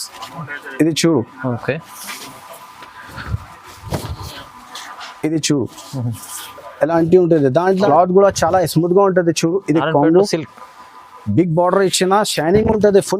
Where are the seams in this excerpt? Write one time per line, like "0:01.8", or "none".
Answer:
0:07.9